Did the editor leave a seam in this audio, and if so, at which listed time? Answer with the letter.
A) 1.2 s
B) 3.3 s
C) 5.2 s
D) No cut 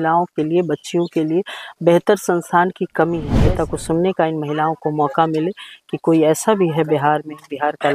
B